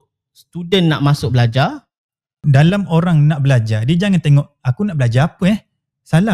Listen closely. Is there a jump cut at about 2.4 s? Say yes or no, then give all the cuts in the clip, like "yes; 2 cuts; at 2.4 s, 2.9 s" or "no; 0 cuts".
yes; 1 cut; at 2.4 s